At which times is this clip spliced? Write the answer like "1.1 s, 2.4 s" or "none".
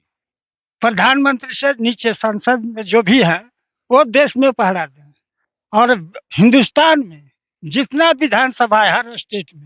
none